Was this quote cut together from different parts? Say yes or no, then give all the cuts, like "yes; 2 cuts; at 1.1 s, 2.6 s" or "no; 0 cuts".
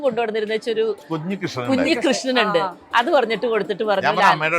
yes; 1 cut; at 1.0 s